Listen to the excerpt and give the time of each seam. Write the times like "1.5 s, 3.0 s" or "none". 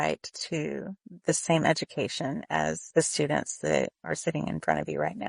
2.8 s, 4.0 s